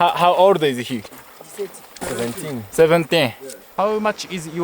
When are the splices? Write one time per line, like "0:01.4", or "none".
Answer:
0:01.2
0:03.6